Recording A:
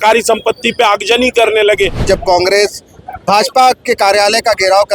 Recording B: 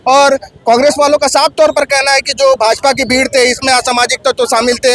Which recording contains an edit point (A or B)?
A